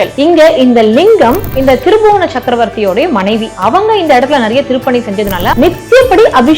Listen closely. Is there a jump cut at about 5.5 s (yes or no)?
yes